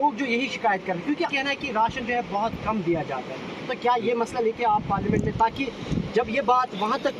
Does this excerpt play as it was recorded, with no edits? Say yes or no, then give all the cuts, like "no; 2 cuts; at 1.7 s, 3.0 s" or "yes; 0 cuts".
no; 1 cut; at 1.3 s